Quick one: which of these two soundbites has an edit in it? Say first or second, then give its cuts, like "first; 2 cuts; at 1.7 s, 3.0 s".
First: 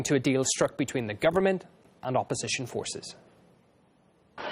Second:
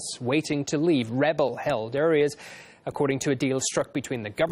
second; 1 cut; at 1.9 s